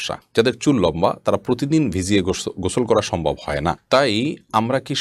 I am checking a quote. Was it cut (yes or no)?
no